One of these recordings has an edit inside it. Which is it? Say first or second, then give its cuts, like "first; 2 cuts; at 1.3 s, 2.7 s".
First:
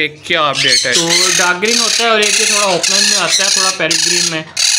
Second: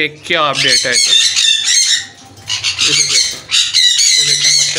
first; 1 cut; at 0.9 s